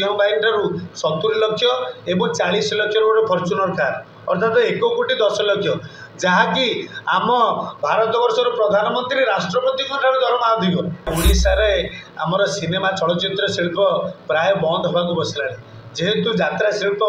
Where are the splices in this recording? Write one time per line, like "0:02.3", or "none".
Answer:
0:11.1